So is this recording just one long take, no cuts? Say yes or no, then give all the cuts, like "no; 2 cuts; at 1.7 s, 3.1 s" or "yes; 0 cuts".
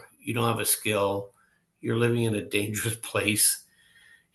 yes; 0 cuts